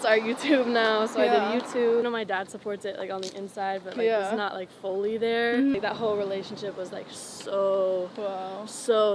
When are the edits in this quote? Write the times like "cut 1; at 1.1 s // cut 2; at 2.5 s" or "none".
cut 1; at 2.0 s // cut 2; at 5.8 s